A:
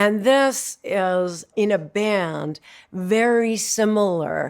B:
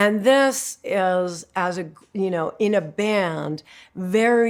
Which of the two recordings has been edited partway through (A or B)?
A